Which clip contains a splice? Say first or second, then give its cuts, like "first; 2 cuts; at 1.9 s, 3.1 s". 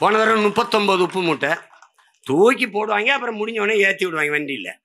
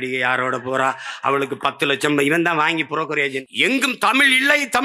second; 1 cut; at 3.4 s